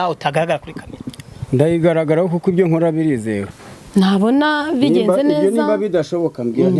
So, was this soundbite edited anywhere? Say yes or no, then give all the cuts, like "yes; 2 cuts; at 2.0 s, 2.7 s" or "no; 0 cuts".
yes; 1 cut; at 3.5 s